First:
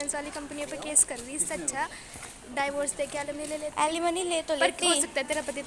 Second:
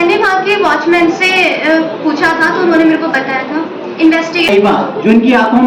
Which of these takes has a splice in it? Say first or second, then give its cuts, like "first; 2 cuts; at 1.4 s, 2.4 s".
second; 1 cut; at 4.5 s